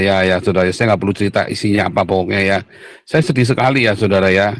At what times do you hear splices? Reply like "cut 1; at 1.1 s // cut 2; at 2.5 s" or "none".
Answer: none